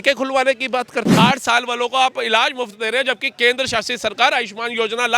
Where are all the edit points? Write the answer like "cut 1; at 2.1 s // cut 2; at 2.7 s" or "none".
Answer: cut 1; at 1.1 s